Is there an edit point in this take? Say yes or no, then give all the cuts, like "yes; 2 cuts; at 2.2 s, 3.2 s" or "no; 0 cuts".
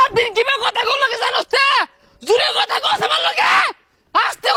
no; 0 cuts